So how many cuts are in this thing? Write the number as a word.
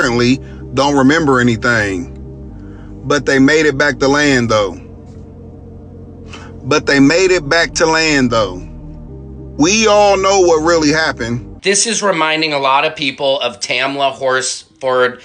one